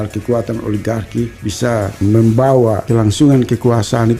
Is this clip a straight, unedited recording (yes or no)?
no